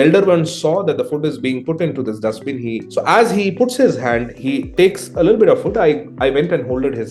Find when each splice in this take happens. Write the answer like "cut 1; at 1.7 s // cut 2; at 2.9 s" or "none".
cut 1; at 2.8 s // cut 2; at 4.3 s

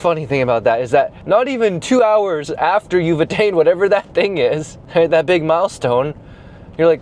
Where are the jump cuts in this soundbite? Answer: cut 1; at 1.2 s // cut 2; at 4.7 s

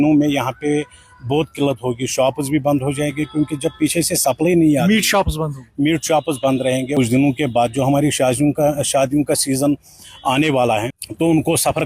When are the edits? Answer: cut 1; at 6.9 s // cut 2; at 10.9 s

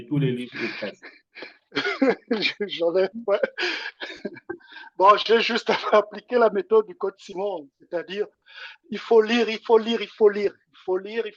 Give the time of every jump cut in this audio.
none

